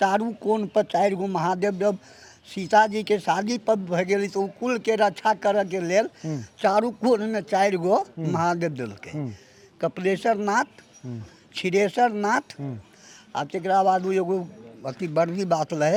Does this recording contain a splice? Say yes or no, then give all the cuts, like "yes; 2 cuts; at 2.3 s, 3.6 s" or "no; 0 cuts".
no; 0 cuts